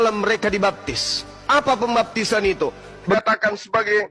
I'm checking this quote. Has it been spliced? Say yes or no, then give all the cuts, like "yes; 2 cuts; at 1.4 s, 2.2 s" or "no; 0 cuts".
yes; 1 cut; at 3.1 s